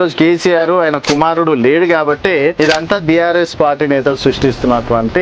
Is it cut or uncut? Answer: cut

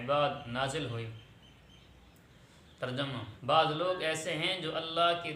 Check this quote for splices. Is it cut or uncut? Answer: cut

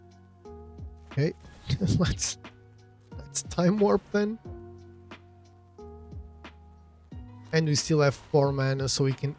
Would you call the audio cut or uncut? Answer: cut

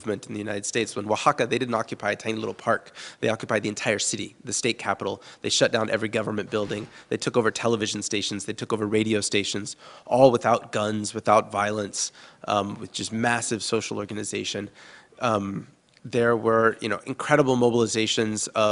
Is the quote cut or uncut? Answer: cut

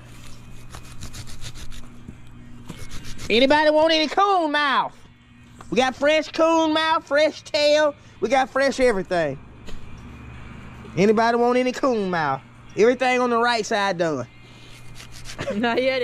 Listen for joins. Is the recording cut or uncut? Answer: uncut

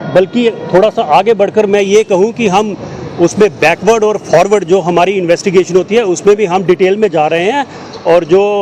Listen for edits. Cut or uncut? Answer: uncut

